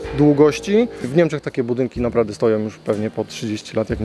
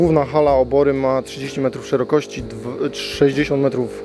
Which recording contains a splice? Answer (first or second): first